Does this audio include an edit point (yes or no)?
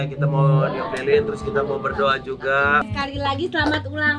yes